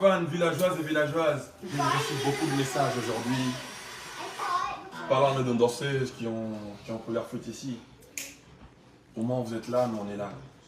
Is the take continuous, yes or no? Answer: no